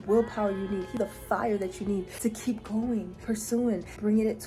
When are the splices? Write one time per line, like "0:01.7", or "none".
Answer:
0:01.0
0:02.1
0:03.4